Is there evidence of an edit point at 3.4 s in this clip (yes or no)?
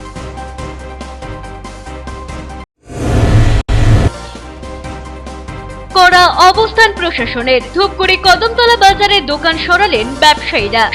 no